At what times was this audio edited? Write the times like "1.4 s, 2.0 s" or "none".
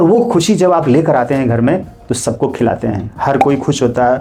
none